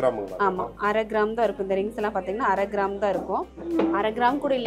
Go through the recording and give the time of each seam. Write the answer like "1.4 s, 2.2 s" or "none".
3.5 s